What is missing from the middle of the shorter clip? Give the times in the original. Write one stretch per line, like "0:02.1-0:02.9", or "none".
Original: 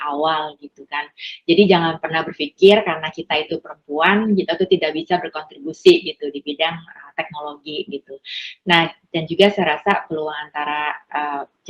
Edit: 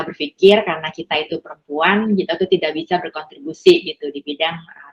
none